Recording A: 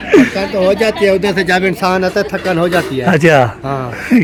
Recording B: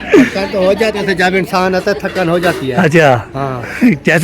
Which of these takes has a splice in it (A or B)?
B